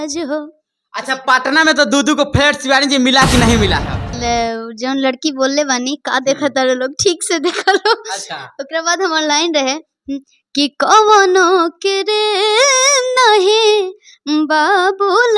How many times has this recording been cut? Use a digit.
1